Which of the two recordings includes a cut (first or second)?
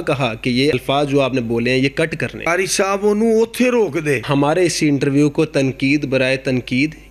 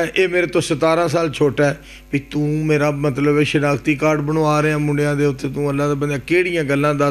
first